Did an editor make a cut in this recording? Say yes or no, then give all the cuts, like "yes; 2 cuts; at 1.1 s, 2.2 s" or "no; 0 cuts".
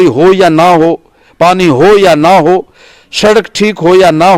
no; 0 cuts